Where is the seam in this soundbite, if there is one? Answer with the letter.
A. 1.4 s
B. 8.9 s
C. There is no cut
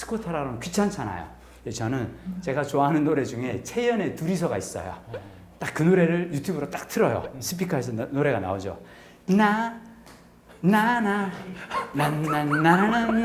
C